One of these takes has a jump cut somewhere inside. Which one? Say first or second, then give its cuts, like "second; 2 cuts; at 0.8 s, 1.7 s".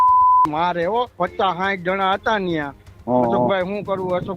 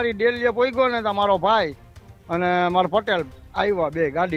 first; 1 cut; at 1.1 s